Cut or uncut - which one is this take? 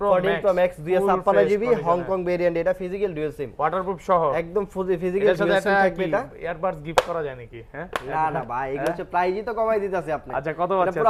uncut